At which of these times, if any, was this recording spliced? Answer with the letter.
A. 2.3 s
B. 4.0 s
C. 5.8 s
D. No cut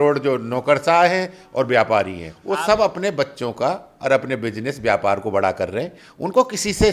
A